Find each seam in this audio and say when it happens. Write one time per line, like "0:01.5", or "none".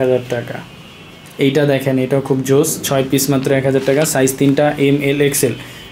none